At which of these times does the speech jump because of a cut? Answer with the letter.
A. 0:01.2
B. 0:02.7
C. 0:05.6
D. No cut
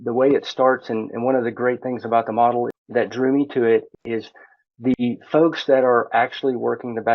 B